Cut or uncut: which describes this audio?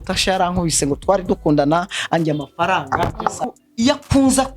cut